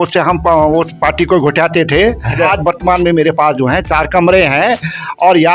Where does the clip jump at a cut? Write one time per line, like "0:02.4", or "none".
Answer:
0:02.5